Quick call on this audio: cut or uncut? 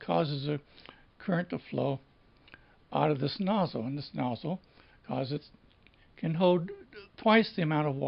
uncut